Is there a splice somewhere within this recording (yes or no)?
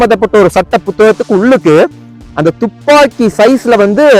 no